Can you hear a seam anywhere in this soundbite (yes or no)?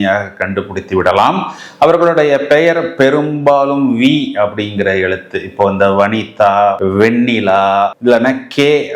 no